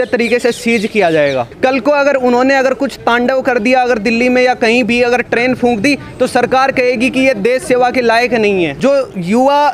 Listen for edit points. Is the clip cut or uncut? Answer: cut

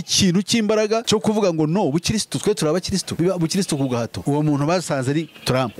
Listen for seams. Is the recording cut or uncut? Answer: cut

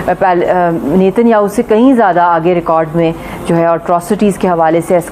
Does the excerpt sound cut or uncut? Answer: uncut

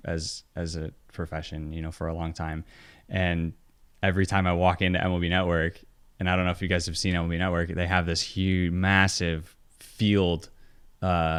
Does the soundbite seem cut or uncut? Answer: uncut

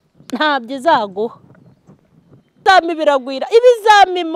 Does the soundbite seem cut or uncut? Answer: cut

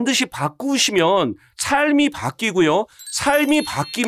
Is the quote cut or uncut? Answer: uncut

